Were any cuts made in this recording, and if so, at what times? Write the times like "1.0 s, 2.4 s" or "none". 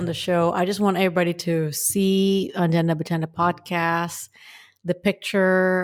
none